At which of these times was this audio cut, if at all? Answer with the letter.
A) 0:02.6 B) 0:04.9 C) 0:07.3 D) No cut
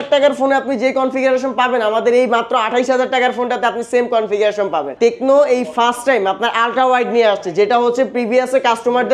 B